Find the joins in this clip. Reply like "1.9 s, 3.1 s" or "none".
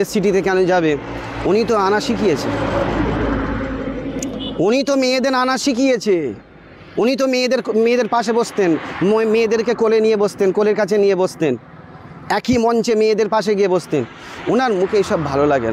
none